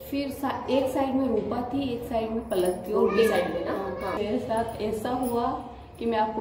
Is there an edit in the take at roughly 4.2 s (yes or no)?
yes